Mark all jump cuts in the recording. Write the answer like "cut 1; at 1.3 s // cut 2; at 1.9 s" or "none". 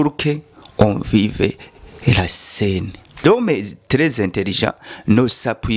cut 1; at 3.2 s

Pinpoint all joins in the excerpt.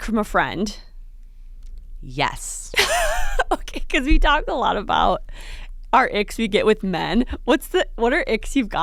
none

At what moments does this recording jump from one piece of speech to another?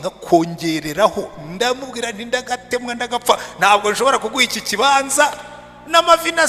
none

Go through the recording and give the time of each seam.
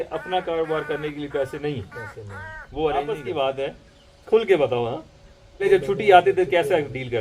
cut 1; at 3.2 s // cut 2; at 5.6 s

